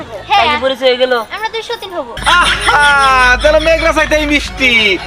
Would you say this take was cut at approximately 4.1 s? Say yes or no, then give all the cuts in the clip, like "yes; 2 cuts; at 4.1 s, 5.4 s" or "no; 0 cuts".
no; 1 cut; at 2.1 s